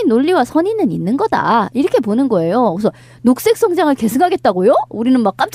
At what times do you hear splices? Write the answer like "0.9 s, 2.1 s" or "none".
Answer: 3.3 s